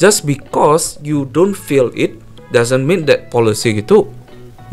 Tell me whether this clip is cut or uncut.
uncut